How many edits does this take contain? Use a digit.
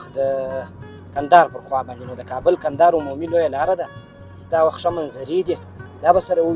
1